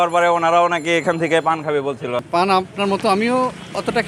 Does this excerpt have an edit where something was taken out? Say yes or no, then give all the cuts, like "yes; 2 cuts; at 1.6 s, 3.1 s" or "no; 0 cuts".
yes; 1 cut; at 2.3 s